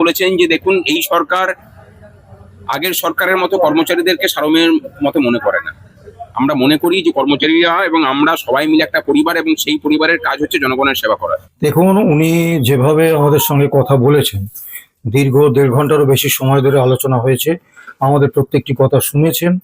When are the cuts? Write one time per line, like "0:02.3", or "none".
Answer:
0:11.5